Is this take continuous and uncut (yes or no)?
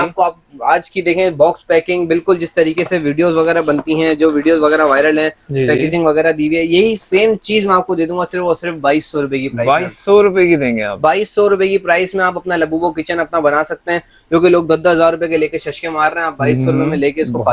yes